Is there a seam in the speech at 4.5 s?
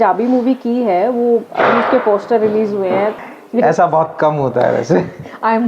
no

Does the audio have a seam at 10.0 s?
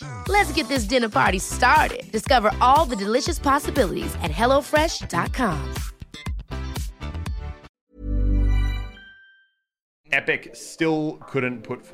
yes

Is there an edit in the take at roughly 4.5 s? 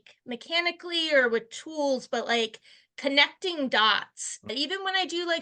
yes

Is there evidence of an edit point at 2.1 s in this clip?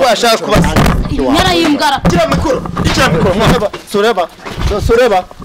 yes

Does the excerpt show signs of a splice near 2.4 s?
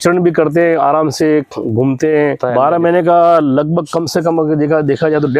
yes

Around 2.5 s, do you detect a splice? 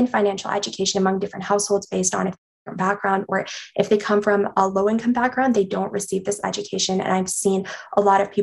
yes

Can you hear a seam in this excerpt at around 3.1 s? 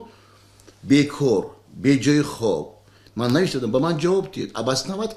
yes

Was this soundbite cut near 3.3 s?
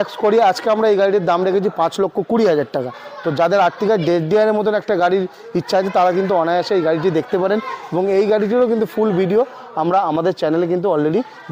no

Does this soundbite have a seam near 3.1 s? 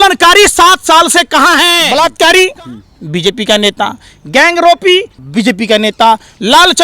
no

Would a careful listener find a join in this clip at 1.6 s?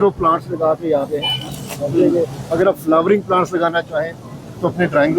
no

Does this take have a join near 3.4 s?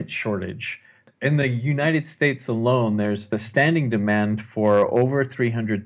yes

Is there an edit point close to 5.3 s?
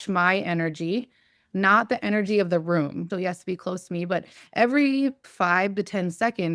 yes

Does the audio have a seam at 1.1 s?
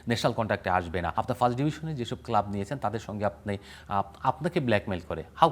yes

